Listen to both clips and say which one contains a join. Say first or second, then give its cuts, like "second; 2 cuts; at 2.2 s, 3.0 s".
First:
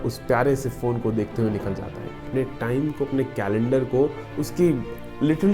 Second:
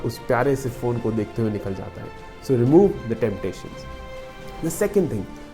first; 1 cut; at 2.2 s